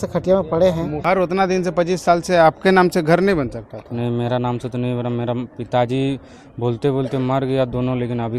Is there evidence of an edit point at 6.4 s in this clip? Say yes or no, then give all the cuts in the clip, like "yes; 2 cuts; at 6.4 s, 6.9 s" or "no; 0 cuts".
no; 1 cut; at 1.0 s